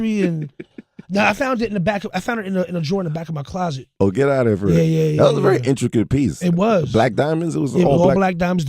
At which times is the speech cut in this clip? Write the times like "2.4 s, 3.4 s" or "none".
4.3 s